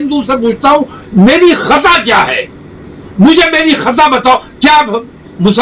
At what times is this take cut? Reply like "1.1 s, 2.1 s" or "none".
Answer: none